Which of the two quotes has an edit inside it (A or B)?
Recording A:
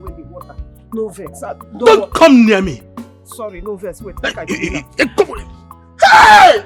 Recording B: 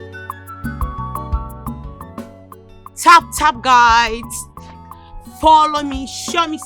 B